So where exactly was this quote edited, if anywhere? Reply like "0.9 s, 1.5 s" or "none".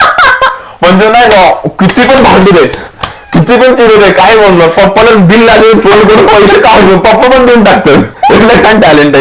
8.1 s